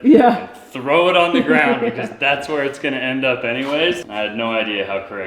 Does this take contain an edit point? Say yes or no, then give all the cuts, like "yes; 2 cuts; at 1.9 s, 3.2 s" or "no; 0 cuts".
yes; 1 cut; at 4.0 s